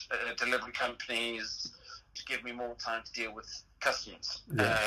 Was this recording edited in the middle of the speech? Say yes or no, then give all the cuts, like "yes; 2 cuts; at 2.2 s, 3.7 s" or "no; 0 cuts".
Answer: yes; 1 cut; at 2.0 s